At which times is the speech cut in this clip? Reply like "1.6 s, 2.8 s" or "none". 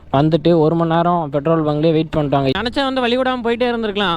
2.6 s

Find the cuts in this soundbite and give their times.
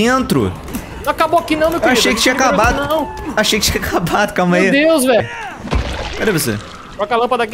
5.2 s

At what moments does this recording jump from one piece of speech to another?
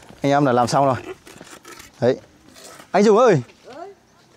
none

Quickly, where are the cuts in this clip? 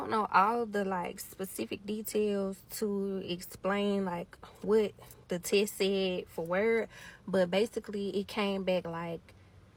none

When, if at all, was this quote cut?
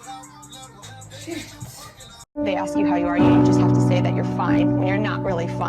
2.0 s

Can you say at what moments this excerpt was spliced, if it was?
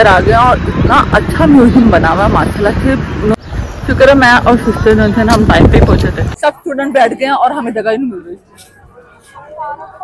3.3 s, 6.3 s

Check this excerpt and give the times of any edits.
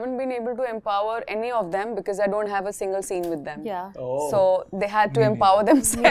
none

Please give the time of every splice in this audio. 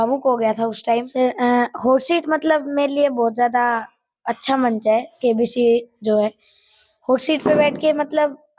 1.1 s

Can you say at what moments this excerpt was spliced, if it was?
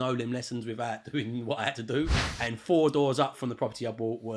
2.1 s

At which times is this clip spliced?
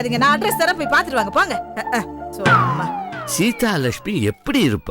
none

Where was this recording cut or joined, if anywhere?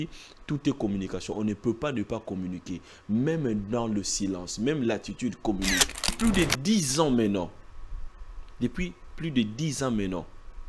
6.2 s

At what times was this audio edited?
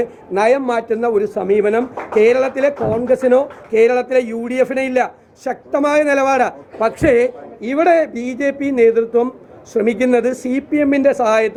none

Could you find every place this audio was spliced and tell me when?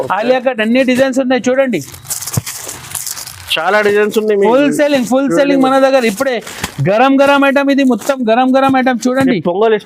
none

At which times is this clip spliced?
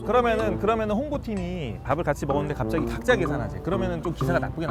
none

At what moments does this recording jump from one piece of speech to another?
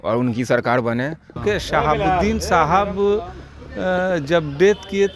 1.3 s

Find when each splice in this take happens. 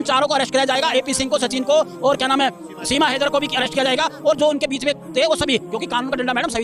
none

